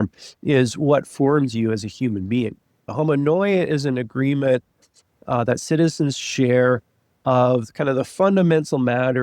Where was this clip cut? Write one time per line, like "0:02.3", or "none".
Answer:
0:02.9